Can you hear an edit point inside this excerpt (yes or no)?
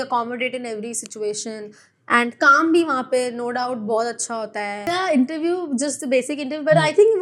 yes